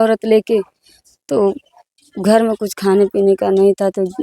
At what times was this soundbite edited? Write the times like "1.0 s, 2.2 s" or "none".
none